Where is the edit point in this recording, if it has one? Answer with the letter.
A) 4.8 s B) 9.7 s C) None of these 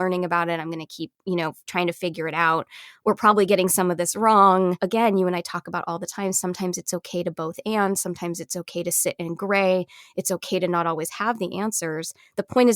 A